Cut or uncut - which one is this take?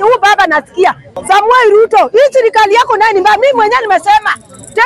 cut